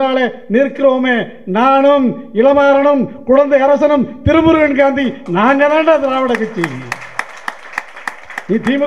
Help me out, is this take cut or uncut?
uncut